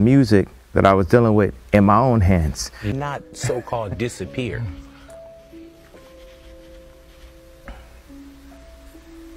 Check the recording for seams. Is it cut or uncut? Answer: cut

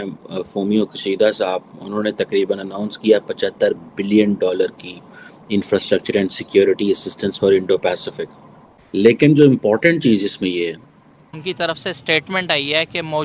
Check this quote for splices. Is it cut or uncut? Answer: cut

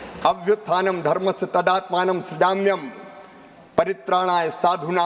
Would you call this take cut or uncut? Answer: uncut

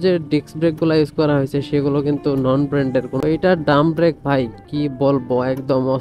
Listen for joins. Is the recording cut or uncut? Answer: cut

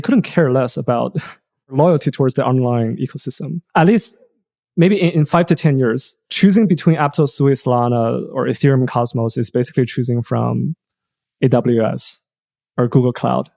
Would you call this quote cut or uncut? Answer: uncut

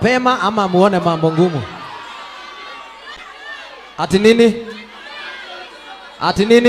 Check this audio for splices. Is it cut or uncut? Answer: uncut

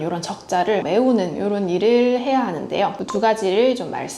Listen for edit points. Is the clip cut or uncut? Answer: cut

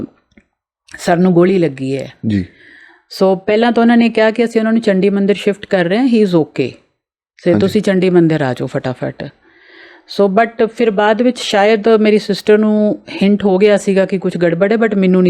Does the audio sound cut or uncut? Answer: uncut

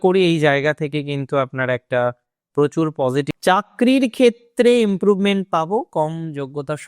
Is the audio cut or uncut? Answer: cut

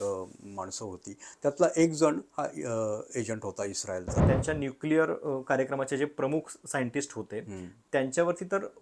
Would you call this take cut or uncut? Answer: cut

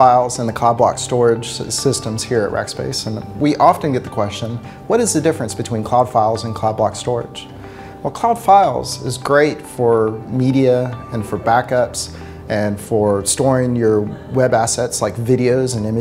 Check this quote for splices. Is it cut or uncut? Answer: uncut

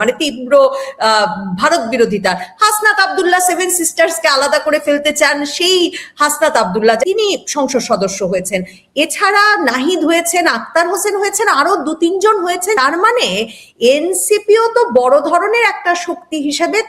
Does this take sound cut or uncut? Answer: cut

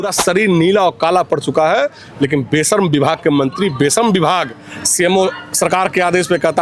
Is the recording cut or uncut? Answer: uncut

